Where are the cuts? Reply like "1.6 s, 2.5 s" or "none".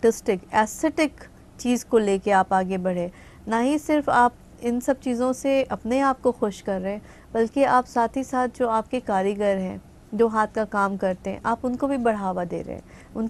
none